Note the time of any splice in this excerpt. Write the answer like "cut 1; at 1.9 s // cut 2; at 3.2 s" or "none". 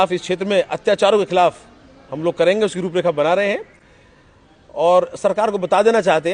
none